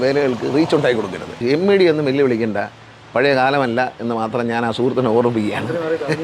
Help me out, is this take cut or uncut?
cut